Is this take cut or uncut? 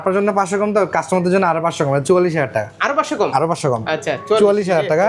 uncut